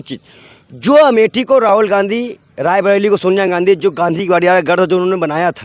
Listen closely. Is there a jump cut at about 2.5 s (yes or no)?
no